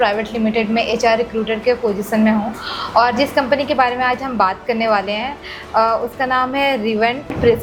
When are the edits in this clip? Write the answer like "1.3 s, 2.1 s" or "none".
none